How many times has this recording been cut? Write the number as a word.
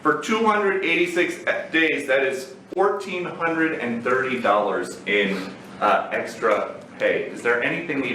zero